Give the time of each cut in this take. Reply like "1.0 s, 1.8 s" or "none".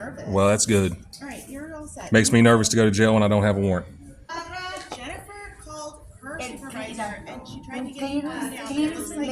4.3 s